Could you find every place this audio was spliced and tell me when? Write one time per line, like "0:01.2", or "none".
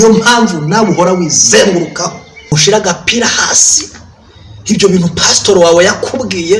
0:02.5